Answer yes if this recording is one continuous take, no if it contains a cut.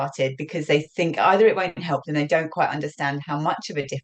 yes